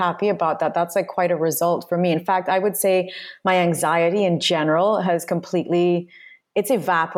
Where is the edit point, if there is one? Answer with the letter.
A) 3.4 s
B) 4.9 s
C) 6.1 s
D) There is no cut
D